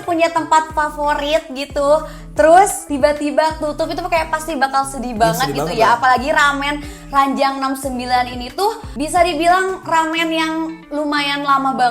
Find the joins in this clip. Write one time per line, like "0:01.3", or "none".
0:02.8
0:08.9